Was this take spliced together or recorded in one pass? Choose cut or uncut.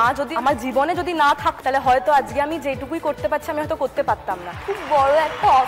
cut